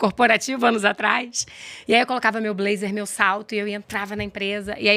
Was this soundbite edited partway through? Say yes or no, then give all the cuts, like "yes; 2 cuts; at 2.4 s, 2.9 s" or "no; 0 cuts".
no; 0 cuts